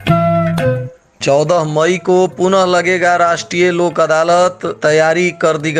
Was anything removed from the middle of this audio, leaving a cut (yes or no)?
yes